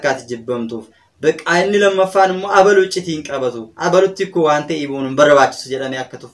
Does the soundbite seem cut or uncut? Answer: uncut